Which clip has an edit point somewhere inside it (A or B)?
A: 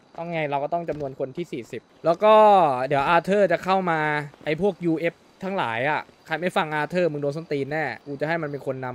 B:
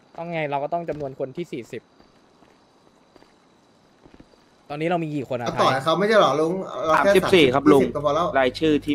A